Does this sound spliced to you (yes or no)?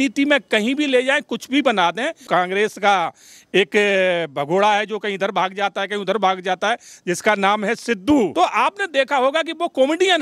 yes